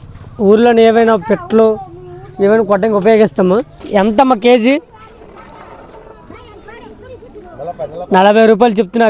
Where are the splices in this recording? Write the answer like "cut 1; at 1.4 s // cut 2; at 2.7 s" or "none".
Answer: cut 1; at 3.8 s